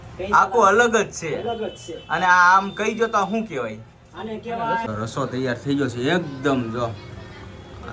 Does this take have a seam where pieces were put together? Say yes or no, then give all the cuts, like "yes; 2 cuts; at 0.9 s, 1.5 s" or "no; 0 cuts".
yes; 1 cut; at 4.9 s